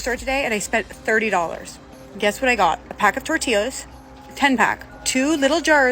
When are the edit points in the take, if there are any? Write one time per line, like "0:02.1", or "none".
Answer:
0:02.9
0:04.9